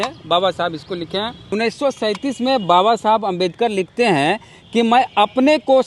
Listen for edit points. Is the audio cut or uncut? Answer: cut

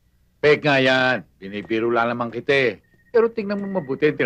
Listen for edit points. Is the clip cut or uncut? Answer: uncut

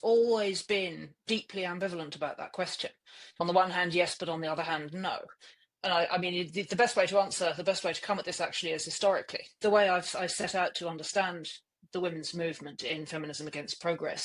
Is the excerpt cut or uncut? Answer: cut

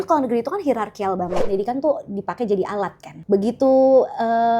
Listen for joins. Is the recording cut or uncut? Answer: cut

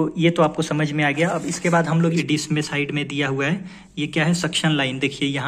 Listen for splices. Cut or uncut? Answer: cut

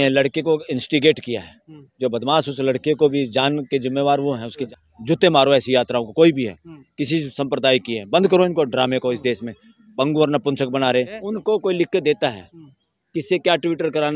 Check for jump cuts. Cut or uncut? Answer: cut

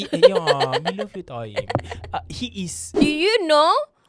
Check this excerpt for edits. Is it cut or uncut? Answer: cut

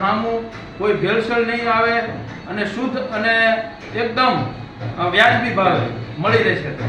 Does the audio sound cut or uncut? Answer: uncut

